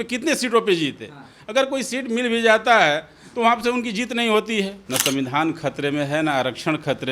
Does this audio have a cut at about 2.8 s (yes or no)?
no